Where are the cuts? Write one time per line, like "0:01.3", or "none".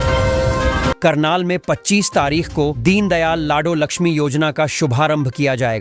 0:01.0